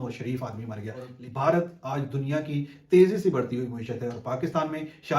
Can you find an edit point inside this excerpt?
yes; 1 cut; at 1.2 s

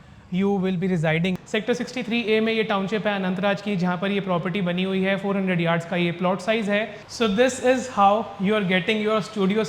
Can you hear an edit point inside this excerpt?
yes; 2 cuts; at 1.4 s, 7.0 s

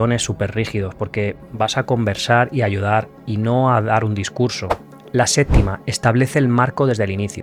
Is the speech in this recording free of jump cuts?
yes; 0 cuts

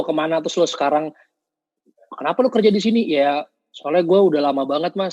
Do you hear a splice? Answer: no; 0 cuts

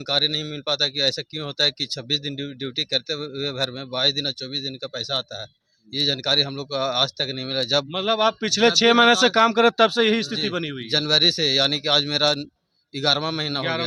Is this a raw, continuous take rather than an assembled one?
yes; 0 cuts

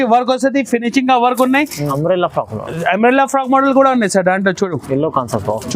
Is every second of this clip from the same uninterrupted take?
no; 1 cut; at 1.8 s

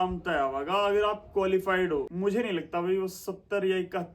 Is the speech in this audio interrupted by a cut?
yes; 1 cut; at 2.1 s

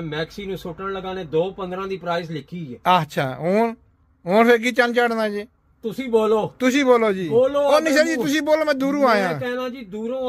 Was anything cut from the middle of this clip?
no; 0 cuts

